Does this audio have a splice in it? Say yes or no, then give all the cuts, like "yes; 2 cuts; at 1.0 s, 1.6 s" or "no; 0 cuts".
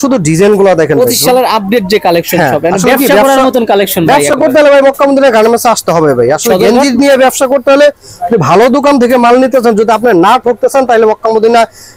no; 0 cuts